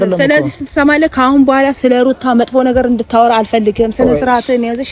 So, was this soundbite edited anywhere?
no; 0 cuts

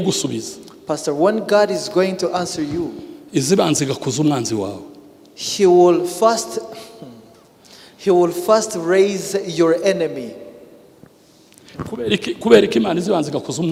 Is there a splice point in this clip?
no; 0 cuts

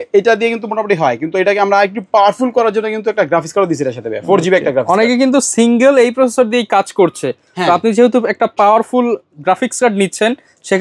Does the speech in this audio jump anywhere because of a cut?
no; 0 cuts

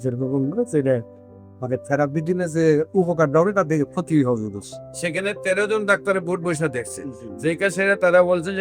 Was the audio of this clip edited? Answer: no; 0 cuts

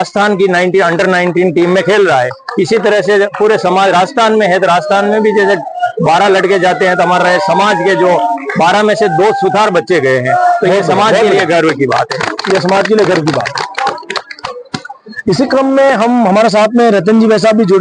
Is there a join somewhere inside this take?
no; 0 cuts

